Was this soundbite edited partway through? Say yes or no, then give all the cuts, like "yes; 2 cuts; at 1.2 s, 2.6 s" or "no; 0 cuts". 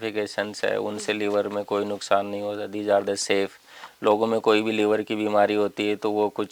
no; 0 cuts